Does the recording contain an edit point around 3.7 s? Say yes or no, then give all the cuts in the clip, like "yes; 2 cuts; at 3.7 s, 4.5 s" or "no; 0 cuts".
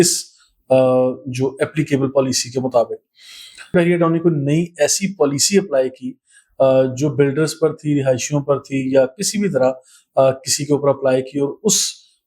yes; 1 cut; at 3.7 s